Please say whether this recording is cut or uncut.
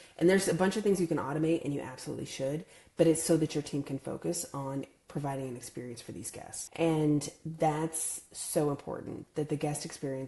cut